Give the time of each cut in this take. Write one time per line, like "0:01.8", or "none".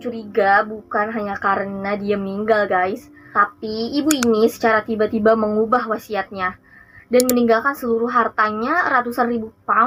none

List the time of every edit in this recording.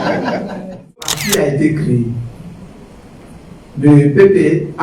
0:01.2

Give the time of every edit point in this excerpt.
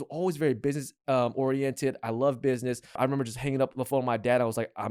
0:03.0

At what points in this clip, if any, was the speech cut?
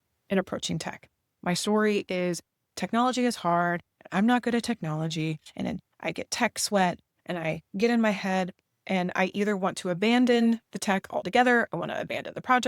0:05.5

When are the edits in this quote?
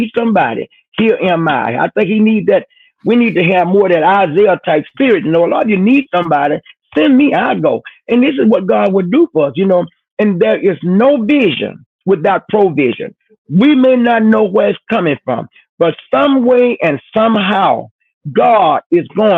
none

